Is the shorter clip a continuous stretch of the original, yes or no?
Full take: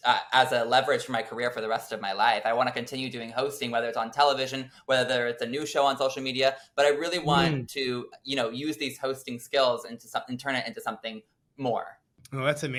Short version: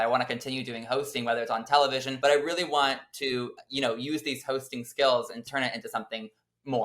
no